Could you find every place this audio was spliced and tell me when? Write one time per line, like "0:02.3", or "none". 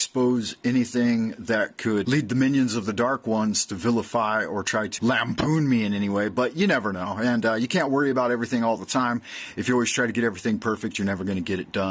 0:02.0
0:04.9